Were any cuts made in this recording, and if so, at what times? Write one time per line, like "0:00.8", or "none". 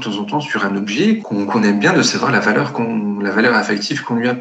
0:01.2